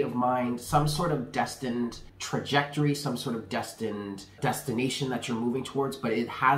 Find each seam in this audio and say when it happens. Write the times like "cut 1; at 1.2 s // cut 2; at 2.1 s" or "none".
cut 1; at 2.1 s // cut 2; at 4.3 s